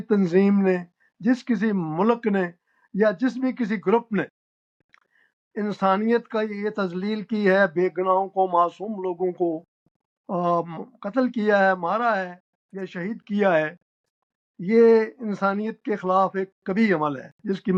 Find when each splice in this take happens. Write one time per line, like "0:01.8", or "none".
none